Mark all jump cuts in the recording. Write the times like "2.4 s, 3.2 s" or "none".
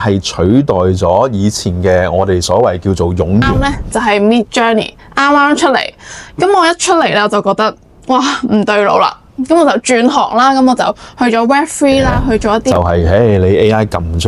3.8 s, 12.7 s